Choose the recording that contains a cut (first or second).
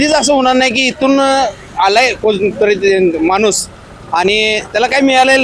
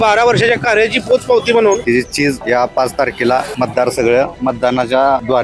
second